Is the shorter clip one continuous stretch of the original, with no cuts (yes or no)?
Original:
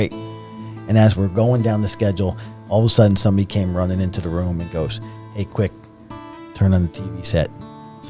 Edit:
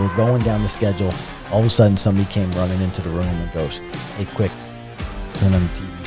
yes